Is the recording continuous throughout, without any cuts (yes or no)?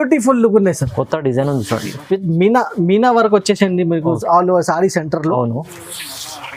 yes